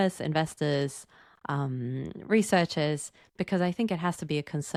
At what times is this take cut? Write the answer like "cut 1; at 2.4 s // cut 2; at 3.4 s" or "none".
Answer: none